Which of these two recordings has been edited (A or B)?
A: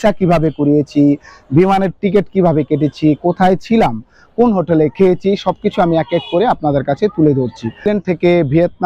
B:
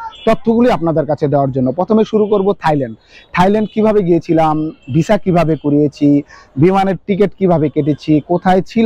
A